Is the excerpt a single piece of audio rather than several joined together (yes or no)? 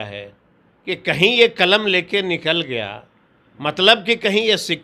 yes